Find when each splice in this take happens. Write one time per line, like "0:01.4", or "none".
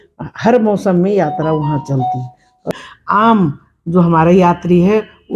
0:02.8